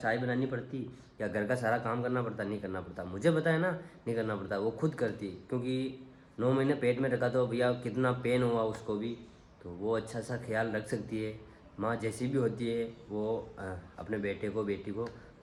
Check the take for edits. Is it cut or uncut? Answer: uncut